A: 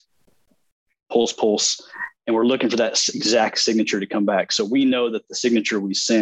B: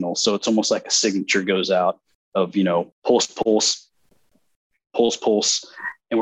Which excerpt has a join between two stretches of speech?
B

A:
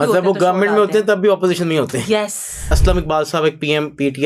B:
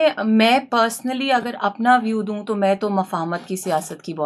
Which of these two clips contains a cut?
A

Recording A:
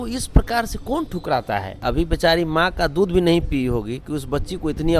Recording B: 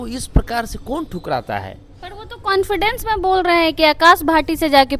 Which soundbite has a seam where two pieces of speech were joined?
A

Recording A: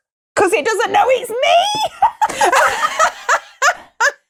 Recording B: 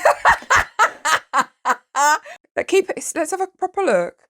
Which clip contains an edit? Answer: B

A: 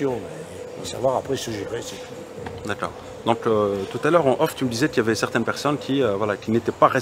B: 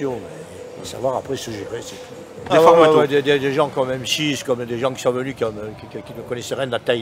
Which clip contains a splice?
B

